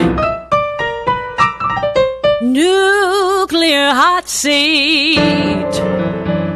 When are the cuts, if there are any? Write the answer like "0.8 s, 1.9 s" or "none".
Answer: none